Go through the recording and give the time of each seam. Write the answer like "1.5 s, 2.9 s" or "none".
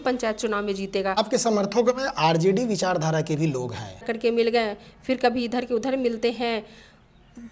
1.2 s, 4.1 s